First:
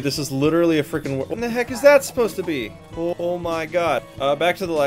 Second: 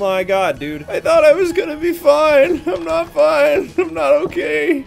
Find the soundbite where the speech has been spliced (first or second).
first